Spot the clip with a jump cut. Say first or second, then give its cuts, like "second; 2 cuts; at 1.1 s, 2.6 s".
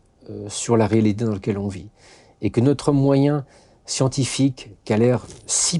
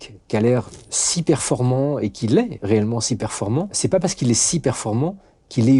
second; 1 cut; at 3.7 s